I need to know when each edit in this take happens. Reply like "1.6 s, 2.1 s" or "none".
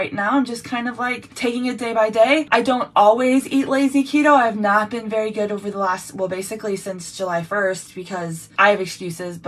1.3 s, 2.5 s, 8.5 s